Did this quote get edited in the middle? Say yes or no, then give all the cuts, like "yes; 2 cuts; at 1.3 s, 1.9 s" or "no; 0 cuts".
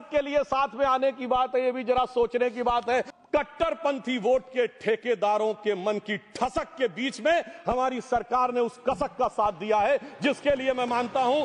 yes; 1 cut; at 3.1 s